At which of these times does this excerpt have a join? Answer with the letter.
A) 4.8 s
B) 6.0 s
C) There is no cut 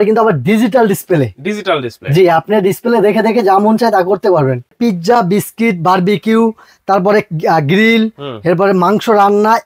A